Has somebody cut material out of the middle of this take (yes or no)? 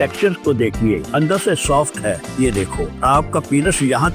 no